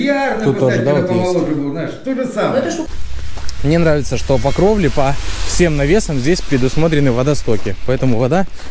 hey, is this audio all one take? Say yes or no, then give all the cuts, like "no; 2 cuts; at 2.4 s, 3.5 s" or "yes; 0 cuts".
no; 1 cut; at 2.8 s